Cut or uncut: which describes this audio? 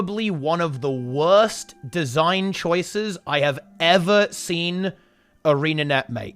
uncut